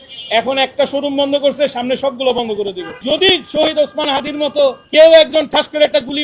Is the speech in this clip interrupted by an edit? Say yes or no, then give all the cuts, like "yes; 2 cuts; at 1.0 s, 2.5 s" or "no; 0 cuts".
yes; 1 cut; at 3.0 s